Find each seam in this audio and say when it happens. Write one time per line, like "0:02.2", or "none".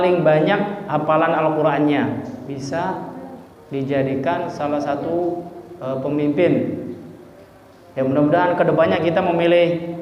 0:02.5